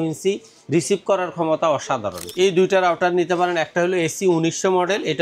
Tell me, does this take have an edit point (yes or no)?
yes